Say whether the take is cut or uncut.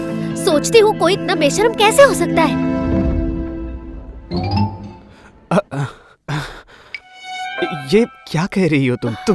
uncut